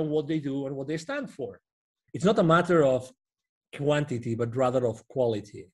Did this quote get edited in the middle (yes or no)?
yes